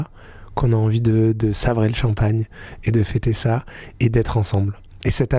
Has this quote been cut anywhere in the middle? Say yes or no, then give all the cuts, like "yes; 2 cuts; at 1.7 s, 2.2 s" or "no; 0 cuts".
no; 0 cuts